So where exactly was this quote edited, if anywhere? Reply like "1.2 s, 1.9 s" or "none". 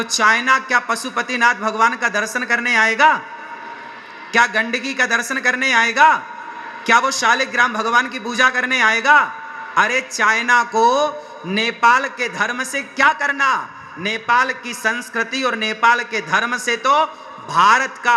none